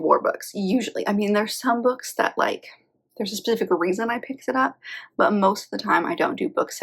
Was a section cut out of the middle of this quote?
no; 0 cuts

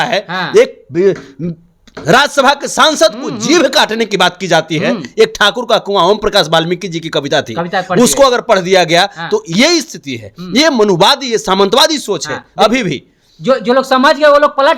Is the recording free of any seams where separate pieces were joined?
yes; 0 cuts

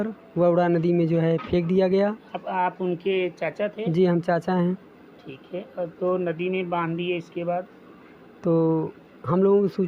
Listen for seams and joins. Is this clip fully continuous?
yes; 0 cuts

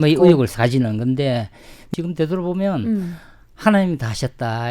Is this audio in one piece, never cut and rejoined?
no; 1 cut; at 1.9 s

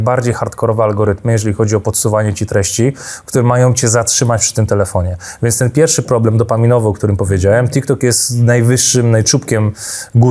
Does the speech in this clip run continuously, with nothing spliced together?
yes; 0 cuts

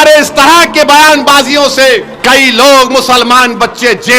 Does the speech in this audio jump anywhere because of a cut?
yes; 1 cut; at 2.1 s

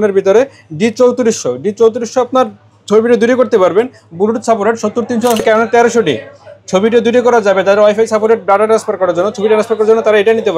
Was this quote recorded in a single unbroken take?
no; 1 cut; at 5.4 s

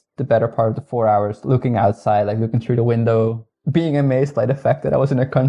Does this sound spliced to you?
yes; 1 cut; at 3.5 s

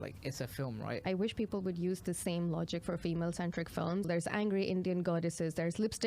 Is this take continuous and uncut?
no; 2 cuts; at 1.0 s, 4.1 s

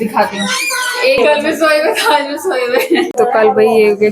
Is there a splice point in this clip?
yes; 2 cuts; at 1.2 s, 3.1 s

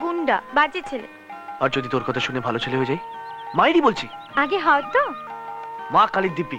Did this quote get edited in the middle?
no; 0 cuts

